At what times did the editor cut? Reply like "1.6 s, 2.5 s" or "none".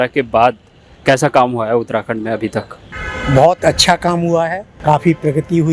4.7 s